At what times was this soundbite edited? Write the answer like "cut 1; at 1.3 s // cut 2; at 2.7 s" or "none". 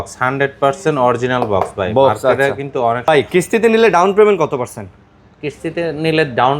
cut 1; at 3.0 s